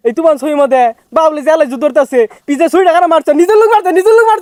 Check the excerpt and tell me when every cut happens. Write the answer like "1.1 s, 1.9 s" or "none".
none